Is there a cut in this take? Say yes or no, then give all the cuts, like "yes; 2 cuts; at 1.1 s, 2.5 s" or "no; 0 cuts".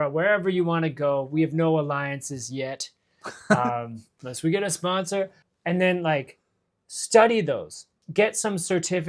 yes; 1 cut; at 5.4 s